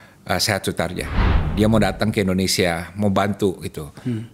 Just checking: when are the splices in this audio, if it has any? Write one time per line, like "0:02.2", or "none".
0:01.2